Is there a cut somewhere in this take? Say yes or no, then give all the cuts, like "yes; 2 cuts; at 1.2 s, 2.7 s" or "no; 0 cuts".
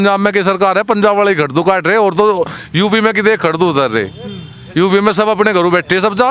no; 0 cuts